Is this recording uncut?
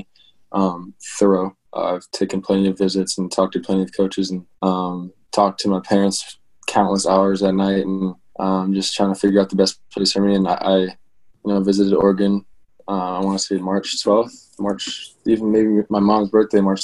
no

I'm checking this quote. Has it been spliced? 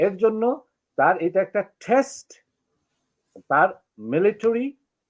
no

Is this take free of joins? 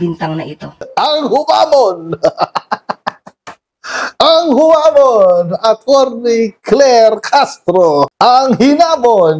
yes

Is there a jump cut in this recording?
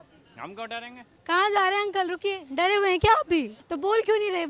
yes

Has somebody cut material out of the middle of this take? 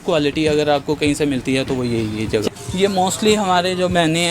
yes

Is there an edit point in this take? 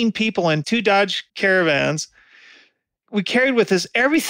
yes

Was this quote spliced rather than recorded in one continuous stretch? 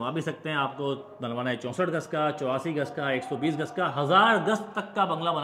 no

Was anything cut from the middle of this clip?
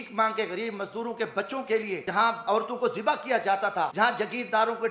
yes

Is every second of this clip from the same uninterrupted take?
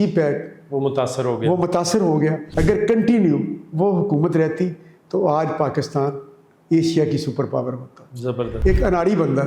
no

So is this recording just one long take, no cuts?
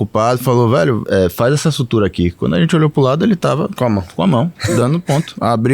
no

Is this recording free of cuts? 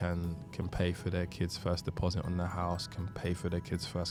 yes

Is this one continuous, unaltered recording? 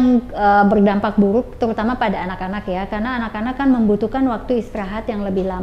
yes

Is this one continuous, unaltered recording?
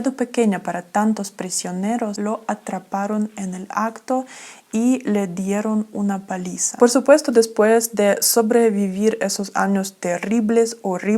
no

